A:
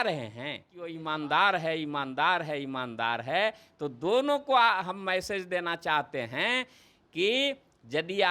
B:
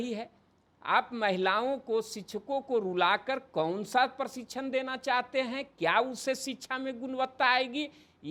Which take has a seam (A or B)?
A